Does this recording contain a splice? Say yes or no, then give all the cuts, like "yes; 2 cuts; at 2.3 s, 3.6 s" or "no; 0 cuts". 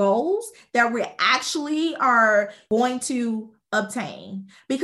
yes; 1 cut; at 2.6 s